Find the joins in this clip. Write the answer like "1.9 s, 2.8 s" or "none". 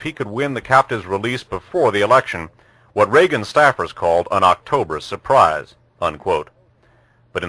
1.0 s